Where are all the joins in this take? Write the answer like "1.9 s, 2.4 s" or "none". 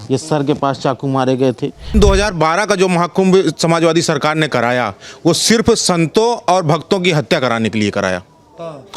1.9 s